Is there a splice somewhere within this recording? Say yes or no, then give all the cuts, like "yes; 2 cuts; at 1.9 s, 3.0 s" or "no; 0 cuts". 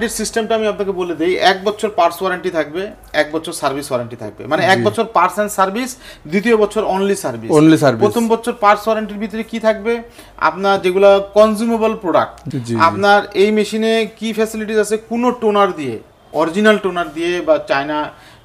yes; 1 cut; at 12.4 s